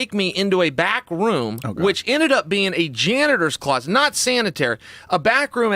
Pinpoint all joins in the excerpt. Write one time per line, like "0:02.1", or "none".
none